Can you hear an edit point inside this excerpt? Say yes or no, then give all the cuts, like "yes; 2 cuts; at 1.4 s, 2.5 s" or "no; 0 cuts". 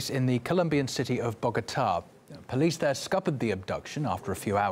yes; 1 cut; at 3.0 s